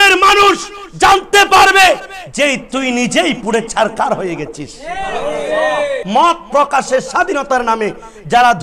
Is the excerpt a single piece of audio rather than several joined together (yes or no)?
no